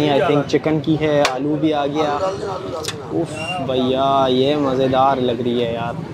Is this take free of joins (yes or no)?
yes